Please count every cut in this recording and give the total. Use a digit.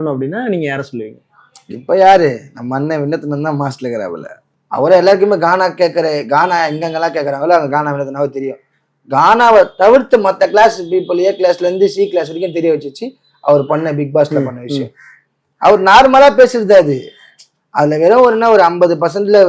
1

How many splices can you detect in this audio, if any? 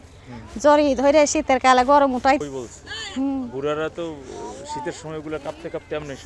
1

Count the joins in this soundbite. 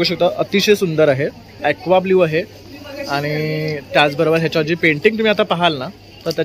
1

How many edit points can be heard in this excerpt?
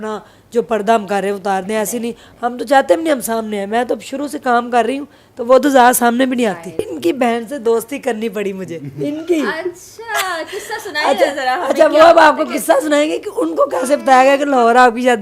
1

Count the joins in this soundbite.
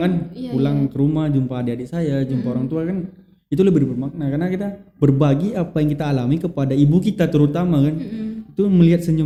0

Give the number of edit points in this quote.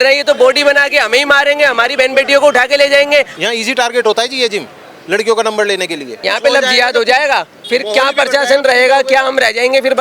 2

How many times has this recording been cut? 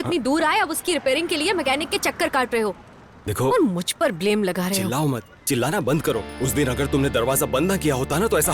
1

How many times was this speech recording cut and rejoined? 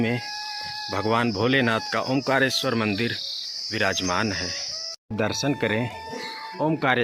1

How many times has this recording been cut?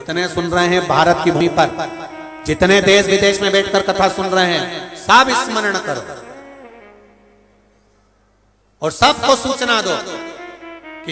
1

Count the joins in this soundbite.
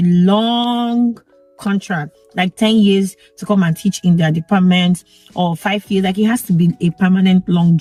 0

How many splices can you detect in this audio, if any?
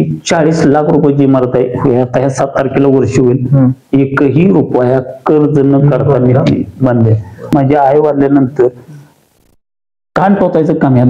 1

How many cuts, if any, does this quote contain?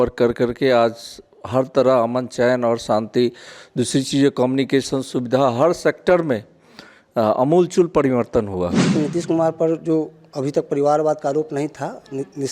1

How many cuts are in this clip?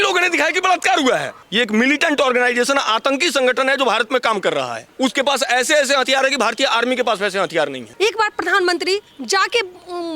3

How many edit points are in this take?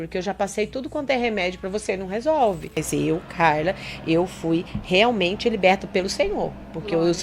1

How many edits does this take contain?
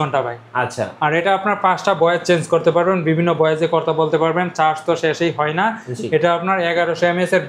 0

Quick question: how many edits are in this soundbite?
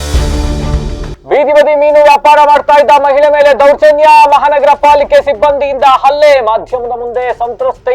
0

